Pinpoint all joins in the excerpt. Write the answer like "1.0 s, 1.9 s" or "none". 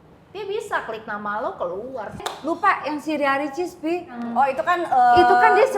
2.2 s, 4.2 s

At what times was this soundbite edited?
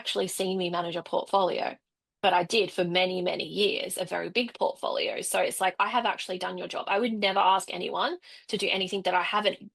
none

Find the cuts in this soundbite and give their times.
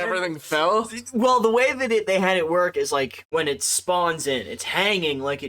3.2 s

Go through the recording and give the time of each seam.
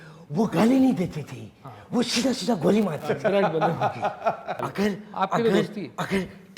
4.5 s

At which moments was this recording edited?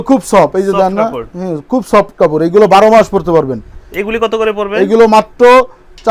none

